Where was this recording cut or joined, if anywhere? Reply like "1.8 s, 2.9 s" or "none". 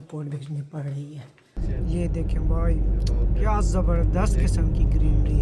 1.6 s